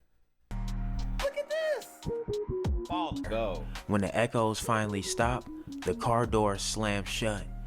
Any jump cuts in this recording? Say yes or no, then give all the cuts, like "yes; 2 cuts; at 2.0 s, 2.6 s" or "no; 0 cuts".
yes; 1 cut; at 3.6 s